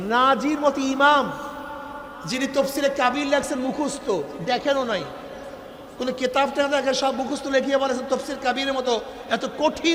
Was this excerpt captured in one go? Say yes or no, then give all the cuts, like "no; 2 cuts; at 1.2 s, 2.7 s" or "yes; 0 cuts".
yes; 0 cuts